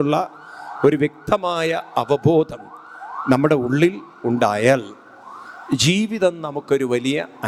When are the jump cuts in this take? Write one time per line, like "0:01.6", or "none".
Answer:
none